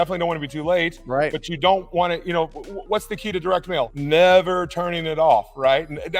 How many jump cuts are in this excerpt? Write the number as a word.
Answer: one